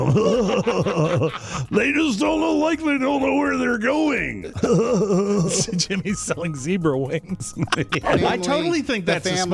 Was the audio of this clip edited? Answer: yes; 1 cut; at 8.1 s

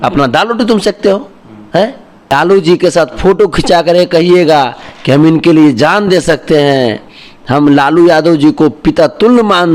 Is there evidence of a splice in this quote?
yes; 1 cut; at 2.3 s

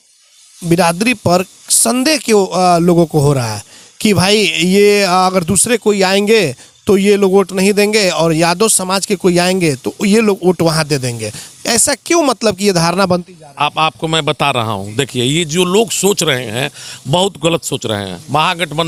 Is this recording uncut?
yes; 0 cuts

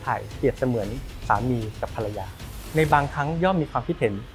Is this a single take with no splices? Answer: yes; 0 cuts

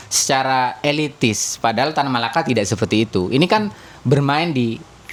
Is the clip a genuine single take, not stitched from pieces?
yes; 0 cuts

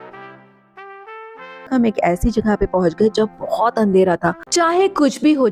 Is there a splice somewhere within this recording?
yes; 2 cuts; at 1.7 s, 4.4 s

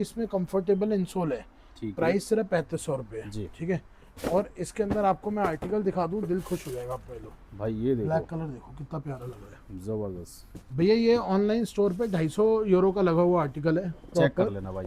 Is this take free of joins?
yes; 0 cuts

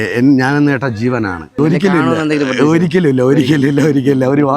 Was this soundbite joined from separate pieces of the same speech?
yes; 1 cut; at 1.6 s

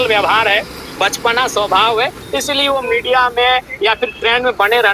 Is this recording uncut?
yes; 0 cuts

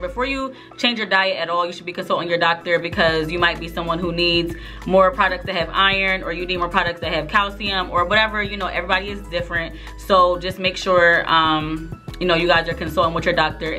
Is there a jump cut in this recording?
no; 0 cuts

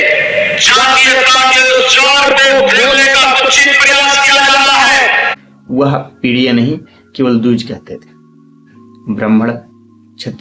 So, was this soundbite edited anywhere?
yes; 1 cut; at 5.4 s

